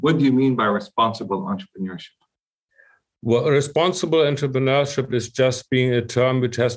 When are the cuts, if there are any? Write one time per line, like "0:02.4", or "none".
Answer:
none